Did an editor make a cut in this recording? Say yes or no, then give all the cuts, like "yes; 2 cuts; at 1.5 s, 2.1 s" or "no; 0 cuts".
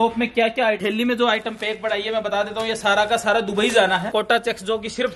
yes; 2 cuts; at 0.8 s, 4.1 s